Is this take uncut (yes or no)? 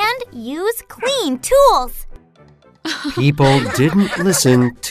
yes